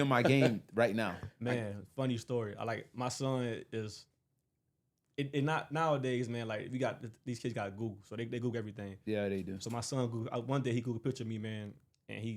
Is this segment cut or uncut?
uncut